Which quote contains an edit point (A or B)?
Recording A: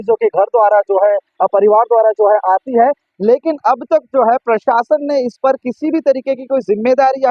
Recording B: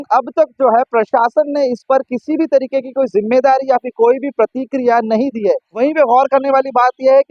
B